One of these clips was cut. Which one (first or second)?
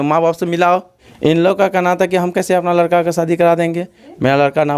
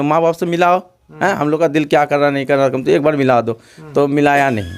first